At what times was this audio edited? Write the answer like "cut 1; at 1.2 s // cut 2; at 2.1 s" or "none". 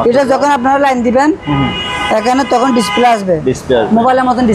none